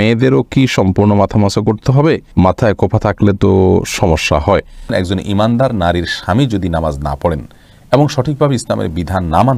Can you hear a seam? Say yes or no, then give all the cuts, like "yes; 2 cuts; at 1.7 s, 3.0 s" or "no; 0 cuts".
yes; 1 cut; at 4.8 s